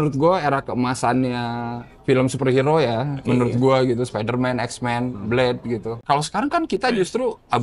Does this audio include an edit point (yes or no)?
yes